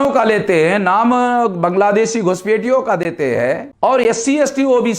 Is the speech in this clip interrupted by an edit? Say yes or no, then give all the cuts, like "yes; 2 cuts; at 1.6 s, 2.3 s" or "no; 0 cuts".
yes; 1 cut; at 3.7 s